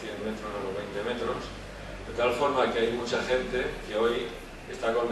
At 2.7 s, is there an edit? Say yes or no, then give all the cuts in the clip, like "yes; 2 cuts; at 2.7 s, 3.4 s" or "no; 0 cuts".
yes; 1 cut; at 2.7 s